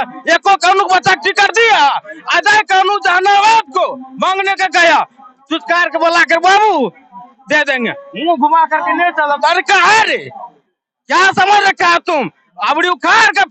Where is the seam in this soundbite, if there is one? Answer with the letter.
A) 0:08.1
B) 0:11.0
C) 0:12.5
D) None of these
D